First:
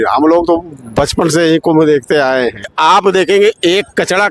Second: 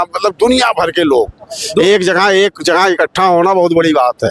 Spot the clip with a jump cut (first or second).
first